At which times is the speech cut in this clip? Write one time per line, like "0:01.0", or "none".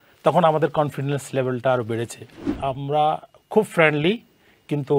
0:02.4